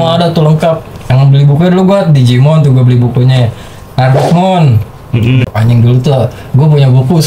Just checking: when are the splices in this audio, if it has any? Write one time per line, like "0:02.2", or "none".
0:05.5